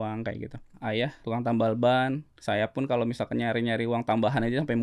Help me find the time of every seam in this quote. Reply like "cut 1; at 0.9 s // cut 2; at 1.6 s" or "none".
cut 1; at 1.2 s // cut 2; at 2.3 s